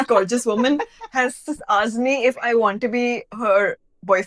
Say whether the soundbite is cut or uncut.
uncut